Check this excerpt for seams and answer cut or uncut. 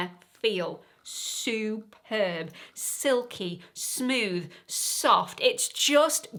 uncut